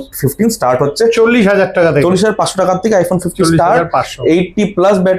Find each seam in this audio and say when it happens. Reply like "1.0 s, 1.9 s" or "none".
none